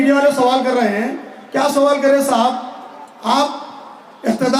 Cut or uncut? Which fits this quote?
uncut